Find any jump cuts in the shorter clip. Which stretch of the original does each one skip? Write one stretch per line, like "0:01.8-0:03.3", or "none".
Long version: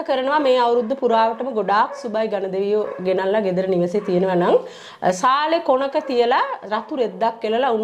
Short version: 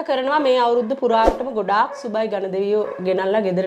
none